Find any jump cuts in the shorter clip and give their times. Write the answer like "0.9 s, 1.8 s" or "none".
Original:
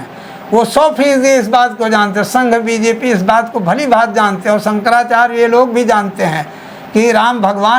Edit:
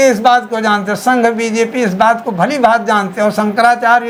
none

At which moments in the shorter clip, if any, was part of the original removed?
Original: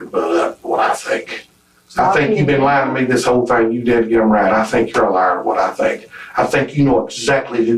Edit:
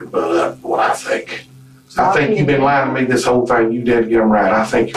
none

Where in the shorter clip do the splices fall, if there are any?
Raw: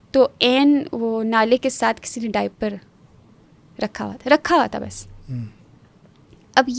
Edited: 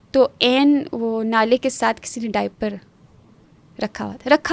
none

